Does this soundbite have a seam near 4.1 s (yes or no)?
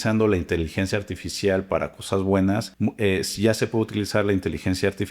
no